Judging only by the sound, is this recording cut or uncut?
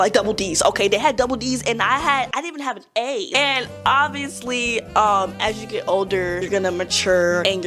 uncut